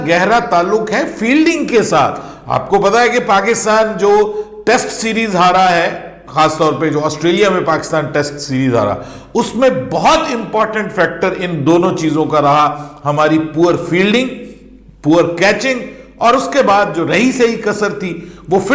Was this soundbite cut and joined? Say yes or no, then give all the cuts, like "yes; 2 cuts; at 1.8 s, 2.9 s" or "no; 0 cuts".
no; 0 cuts